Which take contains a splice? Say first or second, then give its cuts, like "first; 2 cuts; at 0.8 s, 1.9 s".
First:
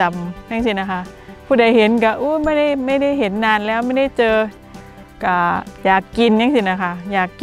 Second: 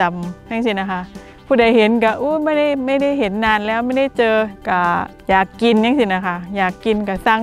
second; 1 cut; at 4.6 s